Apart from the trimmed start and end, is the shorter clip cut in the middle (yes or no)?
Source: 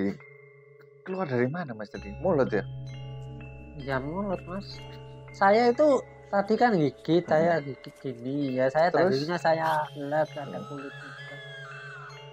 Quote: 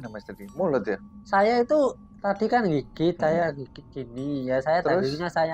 yes